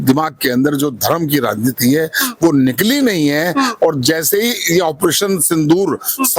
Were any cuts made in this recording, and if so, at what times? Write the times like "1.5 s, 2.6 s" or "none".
none